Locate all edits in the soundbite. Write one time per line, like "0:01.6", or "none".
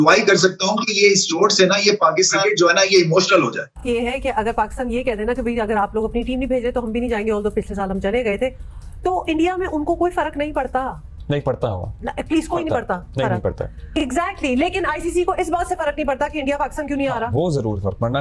0:03.7
0:13.8